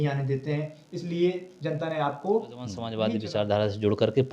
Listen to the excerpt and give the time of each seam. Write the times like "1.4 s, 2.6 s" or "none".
2.8 s